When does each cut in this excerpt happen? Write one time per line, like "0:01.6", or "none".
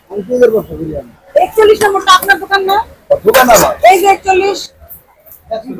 none